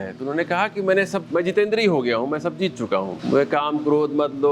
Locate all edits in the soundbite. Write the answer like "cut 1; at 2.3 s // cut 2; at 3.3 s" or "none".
cut 1; at 1.2 s // cut 2; at 3.2 s